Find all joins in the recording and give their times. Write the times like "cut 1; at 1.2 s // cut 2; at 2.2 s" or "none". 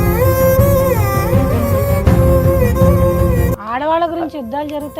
cut 1; at 3.5 s